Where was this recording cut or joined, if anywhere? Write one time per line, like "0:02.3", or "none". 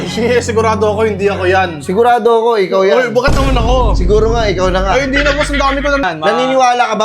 0:06.0